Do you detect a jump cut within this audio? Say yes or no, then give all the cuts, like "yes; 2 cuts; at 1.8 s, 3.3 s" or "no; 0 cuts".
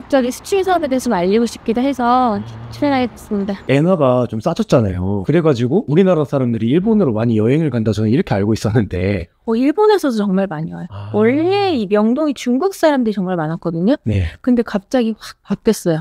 yes; 1 cut; at 3.6 s